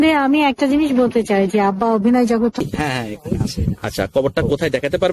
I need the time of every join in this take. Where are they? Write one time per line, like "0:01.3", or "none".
0:02.6

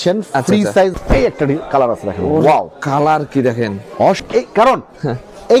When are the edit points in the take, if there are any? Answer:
0:01.0
0:04.2

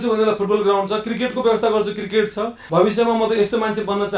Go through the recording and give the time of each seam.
0:02.6

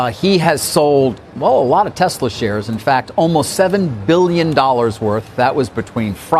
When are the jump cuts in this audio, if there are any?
0:01.3

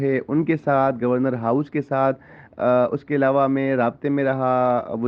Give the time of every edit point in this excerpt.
none

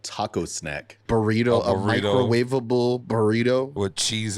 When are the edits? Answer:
0:00.9

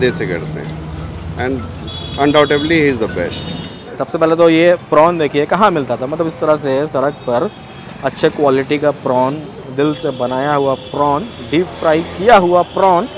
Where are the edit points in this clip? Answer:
0:03.8

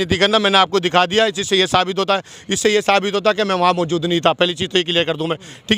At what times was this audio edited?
none

